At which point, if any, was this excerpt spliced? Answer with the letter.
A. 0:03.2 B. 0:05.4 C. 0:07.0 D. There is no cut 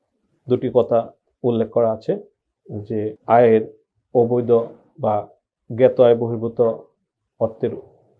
A